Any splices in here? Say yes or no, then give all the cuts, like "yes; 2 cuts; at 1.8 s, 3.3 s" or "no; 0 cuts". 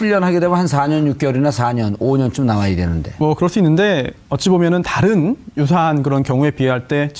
yes; 1 cut; at 4.7 s